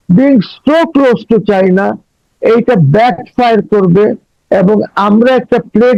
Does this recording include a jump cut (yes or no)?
no